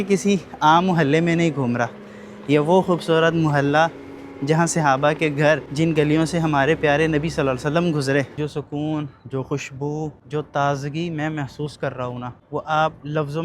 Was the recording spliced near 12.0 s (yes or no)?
no